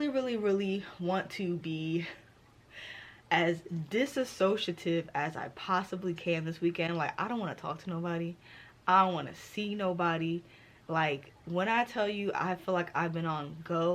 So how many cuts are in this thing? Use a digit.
0